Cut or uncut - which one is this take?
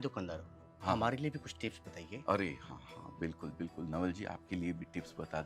uncut